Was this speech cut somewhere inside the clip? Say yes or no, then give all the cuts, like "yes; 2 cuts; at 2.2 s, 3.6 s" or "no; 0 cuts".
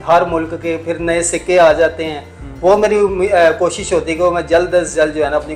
no; 0 cuts